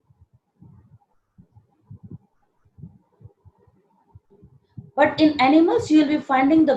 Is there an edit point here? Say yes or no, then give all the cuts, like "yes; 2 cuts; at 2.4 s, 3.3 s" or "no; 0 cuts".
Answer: no; 0 cuts